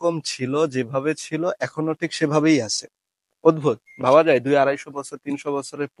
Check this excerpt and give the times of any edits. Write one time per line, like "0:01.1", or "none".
none